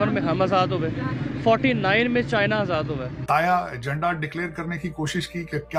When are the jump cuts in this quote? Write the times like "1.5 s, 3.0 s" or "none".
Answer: 3.2 s

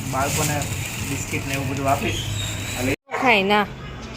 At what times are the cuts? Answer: 2.9 s

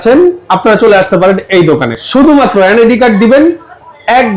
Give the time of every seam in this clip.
none

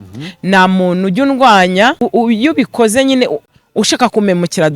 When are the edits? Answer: 2.1 s

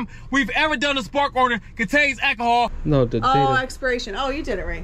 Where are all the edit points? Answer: 2.8 s

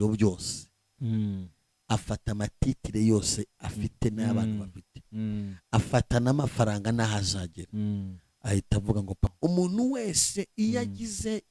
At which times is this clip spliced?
9.3 s

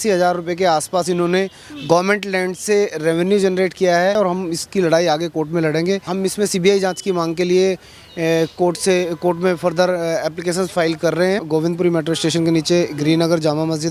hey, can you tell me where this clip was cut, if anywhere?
4.2 s, 6.1 s, 11.4 s

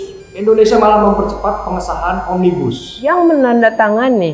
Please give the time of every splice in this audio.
2.9 s

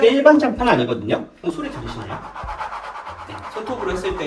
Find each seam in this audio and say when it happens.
none

